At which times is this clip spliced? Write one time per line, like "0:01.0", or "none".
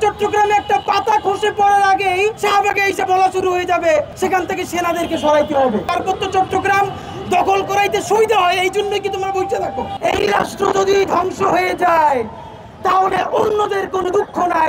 0:02.4
0:04.1
0:05.9
0:09.9